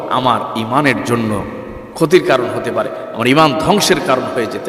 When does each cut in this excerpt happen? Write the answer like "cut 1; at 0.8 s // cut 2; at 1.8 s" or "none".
none